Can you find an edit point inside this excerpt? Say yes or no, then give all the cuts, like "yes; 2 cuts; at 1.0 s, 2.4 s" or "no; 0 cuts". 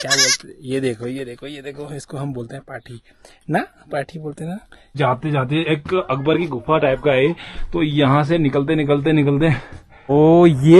yes; 2 cuts; at 4.9 s, 10.1 s